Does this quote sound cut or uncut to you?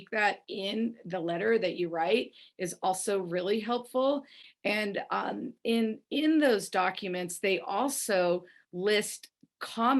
uncut